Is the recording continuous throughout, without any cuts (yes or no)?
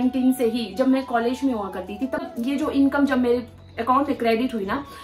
no